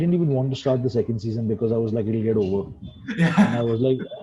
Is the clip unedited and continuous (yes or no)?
yes